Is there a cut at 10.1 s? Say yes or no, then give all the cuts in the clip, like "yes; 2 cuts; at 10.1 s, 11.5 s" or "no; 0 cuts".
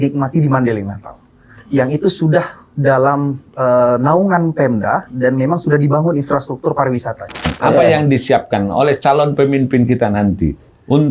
no; 1 cut; at 7.5 s